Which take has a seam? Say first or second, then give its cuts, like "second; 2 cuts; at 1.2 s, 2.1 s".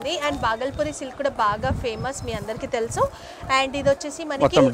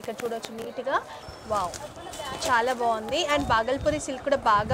second; 1 cut; at 1.2 s